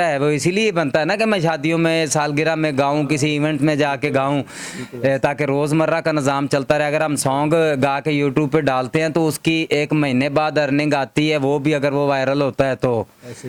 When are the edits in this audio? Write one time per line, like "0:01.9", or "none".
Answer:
none